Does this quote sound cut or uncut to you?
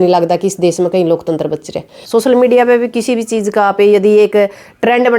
cut